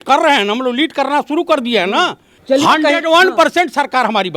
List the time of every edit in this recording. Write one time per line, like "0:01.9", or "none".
0:02.3